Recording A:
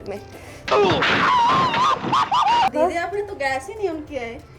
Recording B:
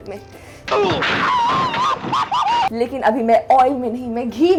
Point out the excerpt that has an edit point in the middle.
A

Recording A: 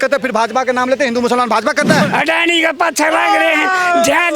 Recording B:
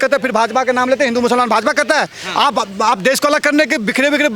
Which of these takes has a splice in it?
A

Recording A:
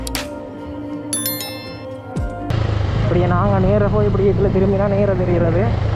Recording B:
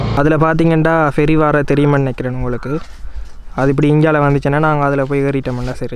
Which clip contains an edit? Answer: A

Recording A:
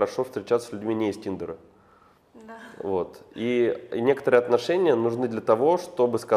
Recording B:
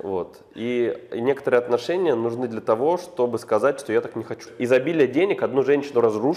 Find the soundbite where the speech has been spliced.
B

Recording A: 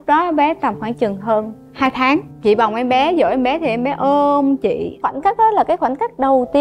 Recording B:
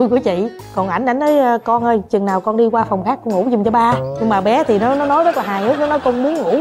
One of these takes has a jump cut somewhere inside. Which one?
A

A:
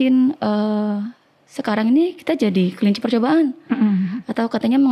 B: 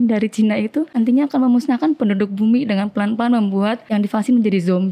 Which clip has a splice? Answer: B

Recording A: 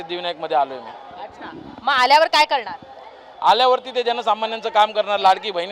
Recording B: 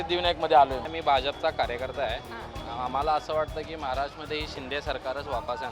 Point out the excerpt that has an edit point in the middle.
B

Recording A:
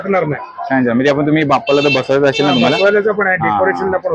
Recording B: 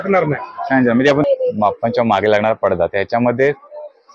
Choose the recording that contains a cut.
B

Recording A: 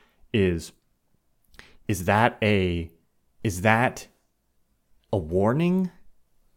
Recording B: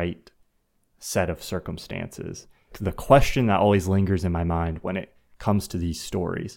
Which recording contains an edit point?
B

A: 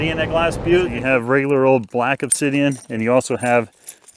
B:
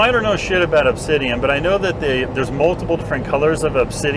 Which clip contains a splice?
A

